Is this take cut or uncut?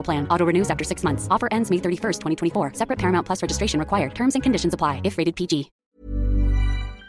cut